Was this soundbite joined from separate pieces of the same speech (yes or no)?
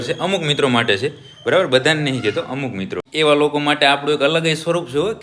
yes